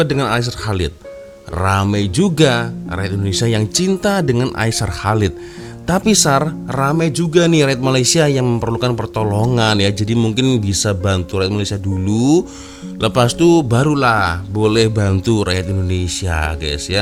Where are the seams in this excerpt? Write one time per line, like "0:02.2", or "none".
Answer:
none